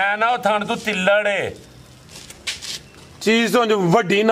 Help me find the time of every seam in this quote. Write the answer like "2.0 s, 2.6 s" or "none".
none

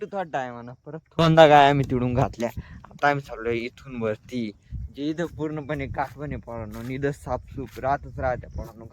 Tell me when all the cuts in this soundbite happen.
1.2 s

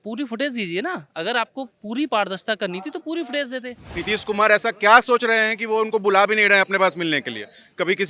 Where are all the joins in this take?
3.9 s

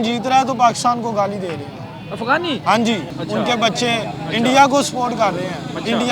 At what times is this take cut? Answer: 3.1 s

